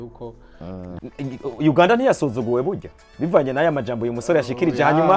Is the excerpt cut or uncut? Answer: cut